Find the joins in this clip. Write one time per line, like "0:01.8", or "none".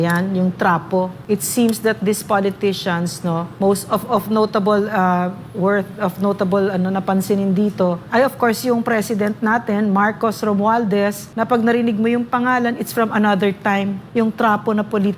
0:01.2
0:03.5
0:08.0
0:11.2
0:14.0